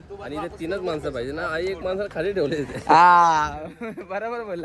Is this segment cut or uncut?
uncut